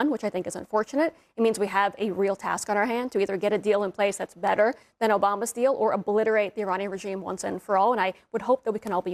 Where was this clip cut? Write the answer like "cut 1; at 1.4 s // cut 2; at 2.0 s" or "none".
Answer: none